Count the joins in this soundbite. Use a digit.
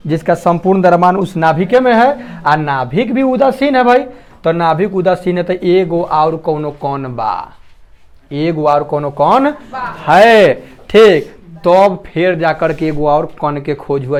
0